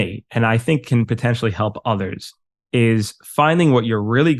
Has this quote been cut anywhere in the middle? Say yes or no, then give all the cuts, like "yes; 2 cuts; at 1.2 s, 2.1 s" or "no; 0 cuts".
no; 0 cuts